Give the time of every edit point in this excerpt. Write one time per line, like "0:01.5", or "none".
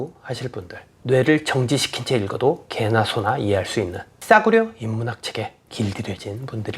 0:00.9
0:04.2
0:05.6